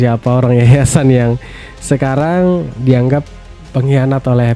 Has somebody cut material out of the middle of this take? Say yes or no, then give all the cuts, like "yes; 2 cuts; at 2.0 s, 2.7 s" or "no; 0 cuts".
no; 0 cuts